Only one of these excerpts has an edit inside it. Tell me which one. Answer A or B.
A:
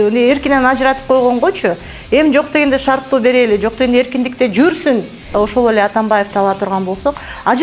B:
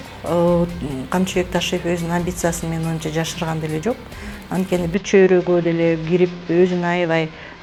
A